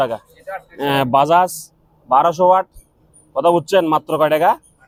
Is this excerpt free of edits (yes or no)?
yes